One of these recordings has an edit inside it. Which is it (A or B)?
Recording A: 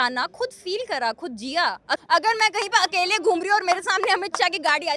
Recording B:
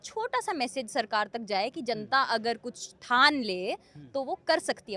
A